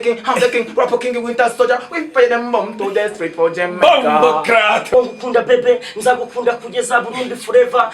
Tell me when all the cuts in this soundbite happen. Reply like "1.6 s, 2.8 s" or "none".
4.9 s

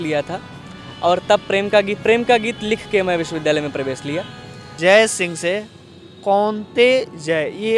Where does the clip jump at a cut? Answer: 4.6 s

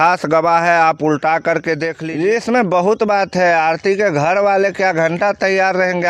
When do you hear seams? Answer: 1.9 s

